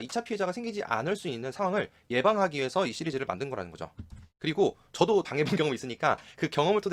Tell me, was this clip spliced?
no; 0 cuts

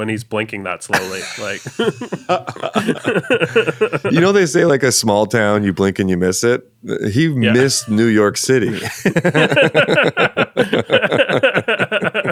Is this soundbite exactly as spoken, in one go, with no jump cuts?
yes; 0 cuts

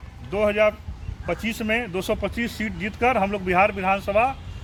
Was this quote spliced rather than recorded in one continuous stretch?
no; 0 cuts

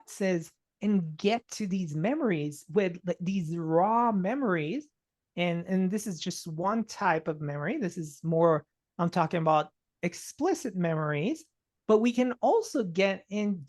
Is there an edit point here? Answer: no; 0 cuts

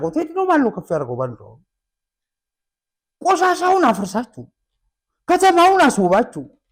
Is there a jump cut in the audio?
no; 0 cuts

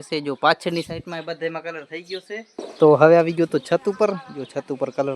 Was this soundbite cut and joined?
yes; 1 cut; at 2.7 s

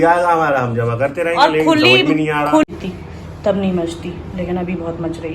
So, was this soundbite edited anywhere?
yes; 1 cut; at 2.7 s

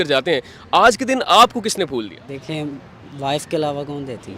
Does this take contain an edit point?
yes; 1 cut; at 2.2 s

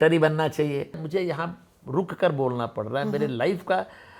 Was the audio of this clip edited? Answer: yes; 1 cut; at 1.0 s

